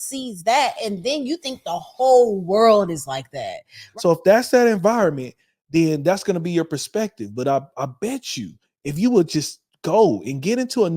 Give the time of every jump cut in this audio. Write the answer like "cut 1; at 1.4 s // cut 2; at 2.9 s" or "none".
cut 1; at 3.8 s